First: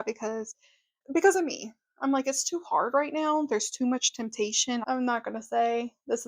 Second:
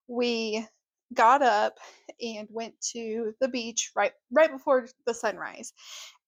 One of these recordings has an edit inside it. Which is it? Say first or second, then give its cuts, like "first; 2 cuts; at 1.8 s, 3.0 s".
first; 1 cut; at 4.8 s